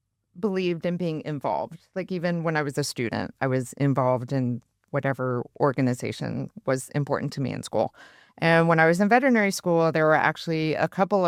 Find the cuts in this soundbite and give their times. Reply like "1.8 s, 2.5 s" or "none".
none